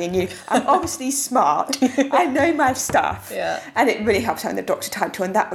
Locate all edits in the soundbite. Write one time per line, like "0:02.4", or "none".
none